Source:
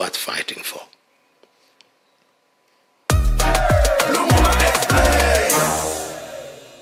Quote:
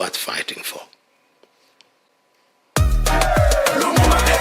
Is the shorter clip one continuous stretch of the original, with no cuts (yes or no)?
no